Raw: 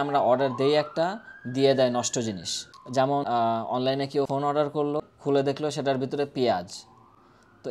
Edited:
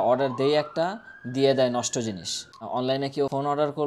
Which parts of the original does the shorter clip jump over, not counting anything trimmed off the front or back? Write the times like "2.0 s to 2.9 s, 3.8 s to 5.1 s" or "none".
2.9 s to 3.6 s